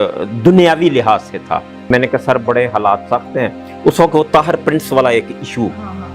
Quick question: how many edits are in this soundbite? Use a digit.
1